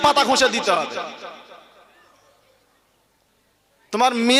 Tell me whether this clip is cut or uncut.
uncut